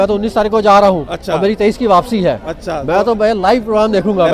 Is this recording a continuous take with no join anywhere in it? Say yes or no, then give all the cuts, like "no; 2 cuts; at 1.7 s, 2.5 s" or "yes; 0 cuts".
yes; 0 cuts